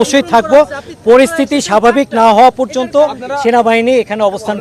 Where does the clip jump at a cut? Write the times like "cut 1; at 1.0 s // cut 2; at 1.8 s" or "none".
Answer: none

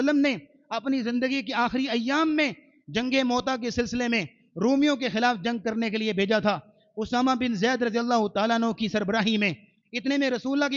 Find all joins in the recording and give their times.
none

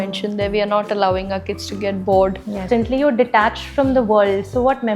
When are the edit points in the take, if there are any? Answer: cut 1; at 2.6 s

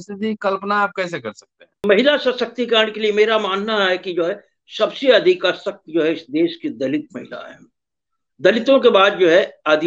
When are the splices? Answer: cut 1; at 1.8 s

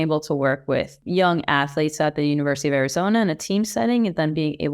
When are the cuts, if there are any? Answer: cut 1; at 1.0 s

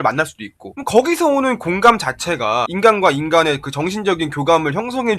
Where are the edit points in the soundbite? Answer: none

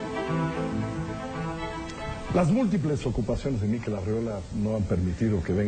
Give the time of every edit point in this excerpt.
none

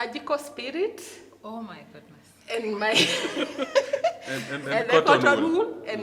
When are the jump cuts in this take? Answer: none

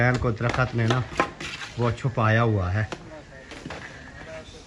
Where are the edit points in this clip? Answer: none

